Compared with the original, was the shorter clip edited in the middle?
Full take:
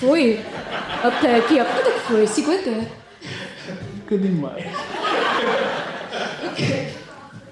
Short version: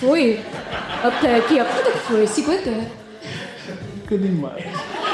no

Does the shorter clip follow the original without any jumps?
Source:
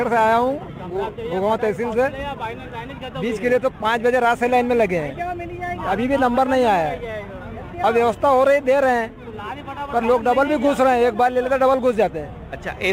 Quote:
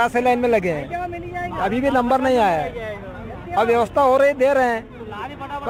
yes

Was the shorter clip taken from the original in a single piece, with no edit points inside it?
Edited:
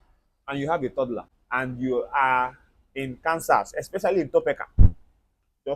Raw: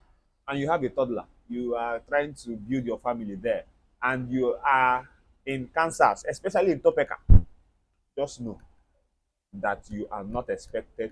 no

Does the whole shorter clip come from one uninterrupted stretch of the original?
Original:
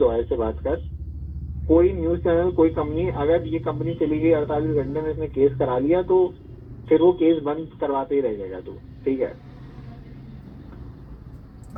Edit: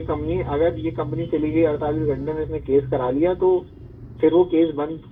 yes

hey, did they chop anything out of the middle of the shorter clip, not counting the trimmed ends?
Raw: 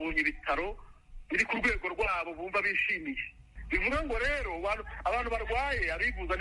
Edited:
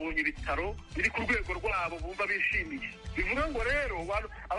yes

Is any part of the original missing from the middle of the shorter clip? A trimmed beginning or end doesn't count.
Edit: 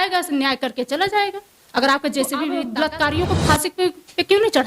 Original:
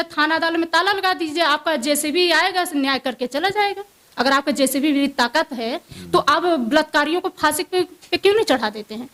yes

